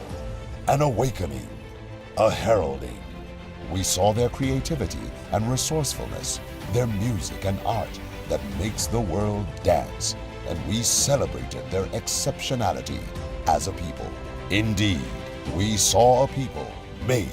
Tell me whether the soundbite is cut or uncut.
cut